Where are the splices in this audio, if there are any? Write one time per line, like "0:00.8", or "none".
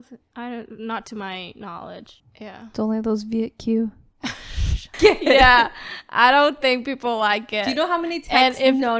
0:04.9